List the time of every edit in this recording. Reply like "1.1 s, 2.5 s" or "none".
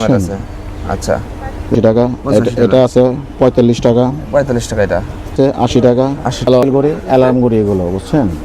1.7 s, 5.3 s, 6.5 s